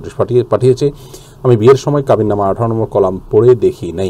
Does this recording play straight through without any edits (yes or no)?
yes